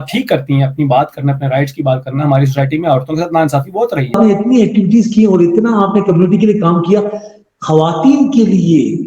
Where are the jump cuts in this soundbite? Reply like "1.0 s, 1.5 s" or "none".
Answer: 4.1 s